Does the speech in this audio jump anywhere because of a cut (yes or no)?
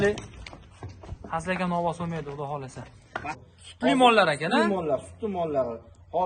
yes